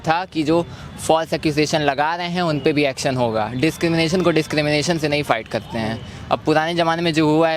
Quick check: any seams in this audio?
no; 0 cuts

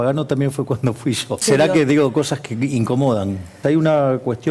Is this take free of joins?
no; 2 cuts; at 1.4 s, 3.5 s

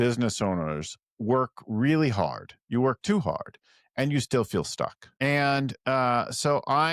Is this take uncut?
yes; 0 cuts

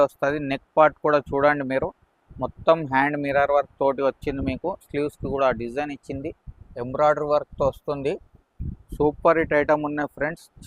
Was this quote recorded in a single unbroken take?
no; 1 cut; at 6.8 s

